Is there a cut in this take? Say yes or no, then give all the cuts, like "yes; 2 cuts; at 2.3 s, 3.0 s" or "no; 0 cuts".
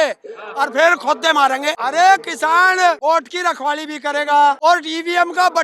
yes; 3 cuts; at 1.8 s, 3.0 s, 4.6 s